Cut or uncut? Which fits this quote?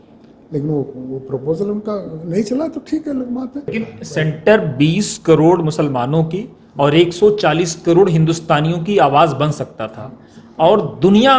cut